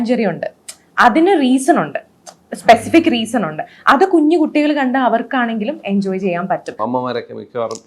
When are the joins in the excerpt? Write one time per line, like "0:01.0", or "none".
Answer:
0:06.8